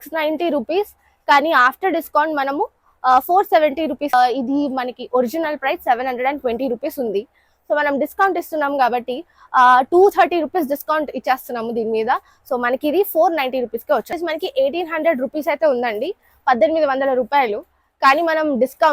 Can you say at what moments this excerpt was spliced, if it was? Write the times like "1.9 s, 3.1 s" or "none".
4.1 s, 14.1 s